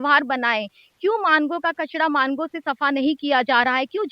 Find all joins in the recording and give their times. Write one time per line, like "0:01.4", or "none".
none